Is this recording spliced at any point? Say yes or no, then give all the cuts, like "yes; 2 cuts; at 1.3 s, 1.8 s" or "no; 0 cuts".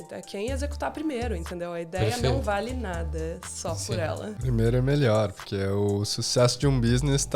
yes; 1 cut; at 4.4 s